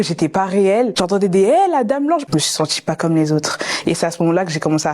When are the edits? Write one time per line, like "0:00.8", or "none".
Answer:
0:00.9
0:02.3